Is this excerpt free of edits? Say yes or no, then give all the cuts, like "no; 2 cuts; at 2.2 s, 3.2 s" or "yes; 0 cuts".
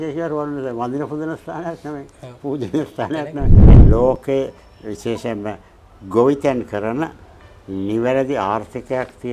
no; 1 cut; at 3.6 s